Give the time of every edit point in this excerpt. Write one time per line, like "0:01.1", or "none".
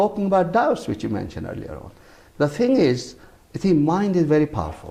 none